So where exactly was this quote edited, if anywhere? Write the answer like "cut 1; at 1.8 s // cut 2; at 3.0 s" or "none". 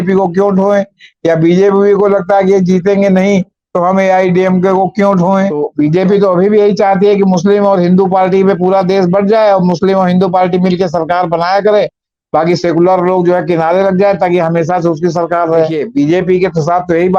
cut 1; at 5.6 s // cut 2; at 15.8 s